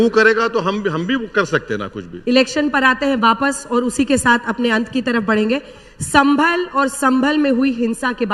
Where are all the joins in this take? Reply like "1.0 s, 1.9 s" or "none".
none